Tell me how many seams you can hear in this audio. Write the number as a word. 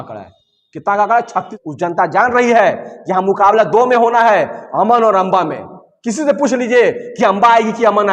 one